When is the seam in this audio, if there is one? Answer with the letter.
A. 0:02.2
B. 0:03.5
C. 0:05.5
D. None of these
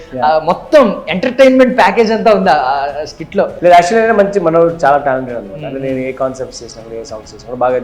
B